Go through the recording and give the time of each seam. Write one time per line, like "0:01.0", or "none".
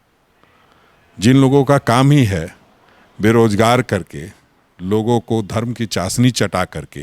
none

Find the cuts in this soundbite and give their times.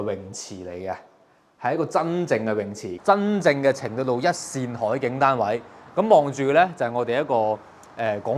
0:02.8

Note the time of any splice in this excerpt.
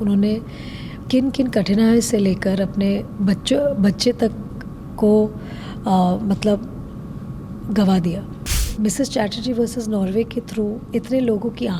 0:08.6

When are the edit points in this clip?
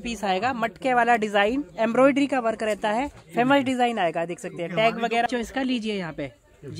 0:05.3

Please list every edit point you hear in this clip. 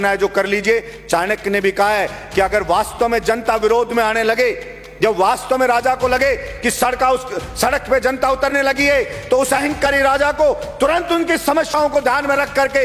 none

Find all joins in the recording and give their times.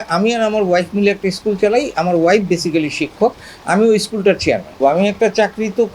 0:04.8

